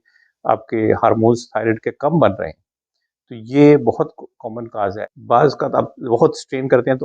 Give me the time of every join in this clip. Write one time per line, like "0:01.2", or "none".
0:04.9